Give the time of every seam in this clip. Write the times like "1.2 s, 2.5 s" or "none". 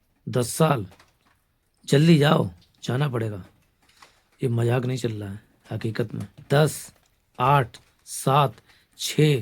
6.4 s